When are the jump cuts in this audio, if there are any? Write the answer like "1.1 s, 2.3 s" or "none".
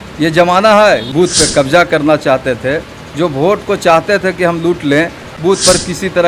1.1 s, 5.3 s

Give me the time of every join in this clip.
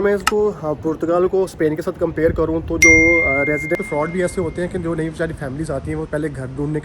3.8 s

